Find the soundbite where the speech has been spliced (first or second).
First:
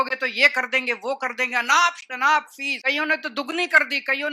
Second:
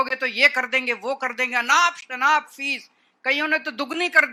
first